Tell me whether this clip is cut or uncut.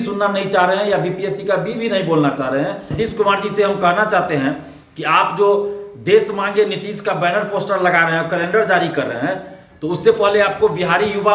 cut